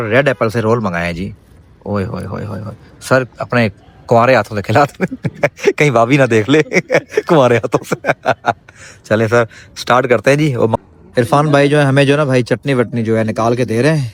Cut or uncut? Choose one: uncut